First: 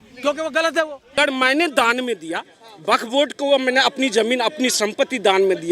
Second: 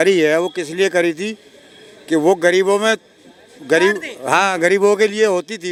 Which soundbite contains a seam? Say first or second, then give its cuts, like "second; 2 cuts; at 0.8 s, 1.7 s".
first; 1 cut; at 1.1 s